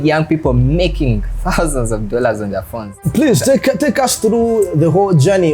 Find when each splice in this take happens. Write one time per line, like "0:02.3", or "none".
0:03.0